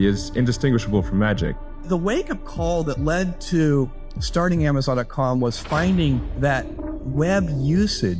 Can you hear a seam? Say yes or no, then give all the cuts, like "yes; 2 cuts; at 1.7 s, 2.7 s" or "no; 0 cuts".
yes; 1 cut; at 1.7 s